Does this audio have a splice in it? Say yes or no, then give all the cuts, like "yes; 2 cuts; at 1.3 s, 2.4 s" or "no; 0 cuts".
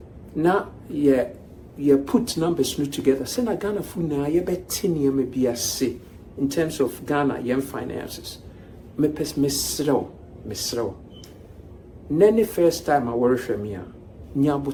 no; 0 cuts